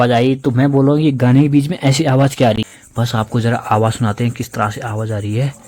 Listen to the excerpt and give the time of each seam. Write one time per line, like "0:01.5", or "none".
0:02.6